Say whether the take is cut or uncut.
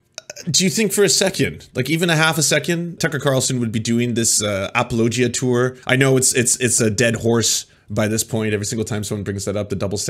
cut